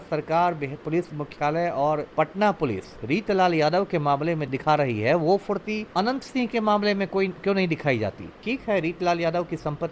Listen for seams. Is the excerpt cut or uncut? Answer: cut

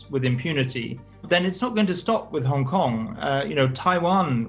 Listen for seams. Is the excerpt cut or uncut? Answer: cut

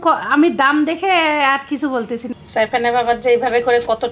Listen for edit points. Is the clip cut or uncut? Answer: cut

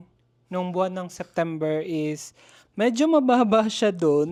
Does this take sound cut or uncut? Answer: uncut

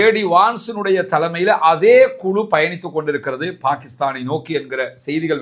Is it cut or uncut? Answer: uncut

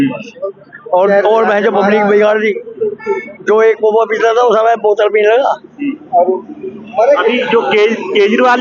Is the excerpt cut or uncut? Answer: uncut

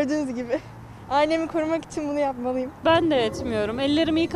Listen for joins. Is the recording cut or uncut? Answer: cut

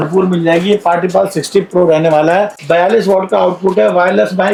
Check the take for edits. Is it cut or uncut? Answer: uncut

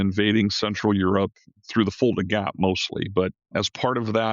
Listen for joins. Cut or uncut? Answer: cut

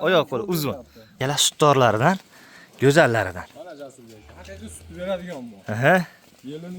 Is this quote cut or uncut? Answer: cut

